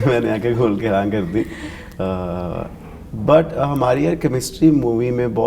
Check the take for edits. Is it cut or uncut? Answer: uncut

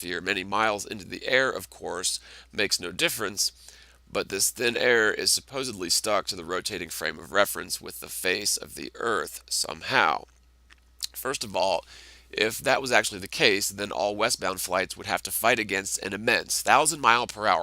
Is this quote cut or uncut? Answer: cut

